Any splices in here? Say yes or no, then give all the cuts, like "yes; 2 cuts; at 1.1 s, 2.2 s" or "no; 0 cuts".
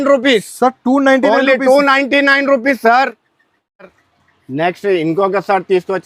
no; 0 cuts